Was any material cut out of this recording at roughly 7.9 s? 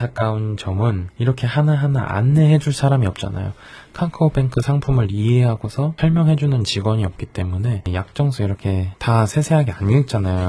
yes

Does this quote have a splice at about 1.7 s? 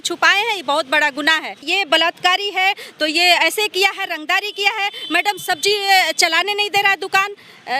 yes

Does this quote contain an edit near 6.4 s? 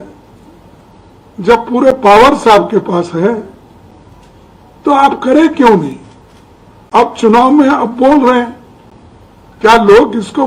no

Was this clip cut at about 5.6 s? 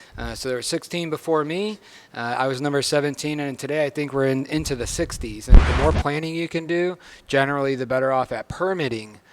yes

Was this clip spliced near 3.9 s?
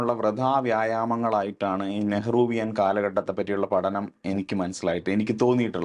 no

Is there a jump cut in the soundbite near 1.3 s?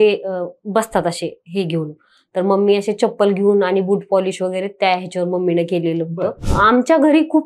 no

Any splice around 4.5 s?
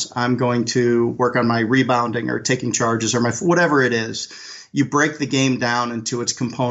no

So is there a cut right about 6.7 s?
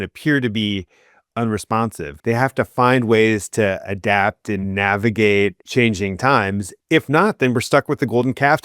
yes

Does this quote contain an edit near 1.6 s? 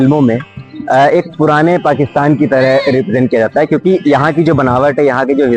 no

